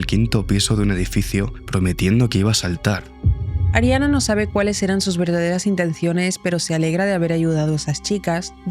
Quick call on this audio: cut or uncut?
cut